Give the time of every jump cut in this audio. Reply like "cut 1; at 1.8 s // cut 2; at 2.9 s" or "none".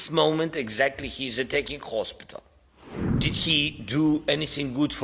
cut 1; at 3.1 s